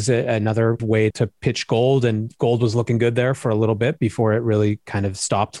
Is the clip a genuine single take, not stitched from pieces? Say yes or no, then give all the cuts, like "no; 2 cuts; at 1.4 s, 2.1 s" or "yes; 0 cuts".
no; 1 cut; at 1.0 s